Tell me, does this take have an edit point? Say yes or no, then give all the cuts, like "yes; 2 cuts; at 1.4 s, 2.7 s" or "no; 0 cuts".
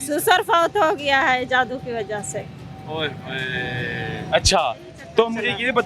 no; 0 cuts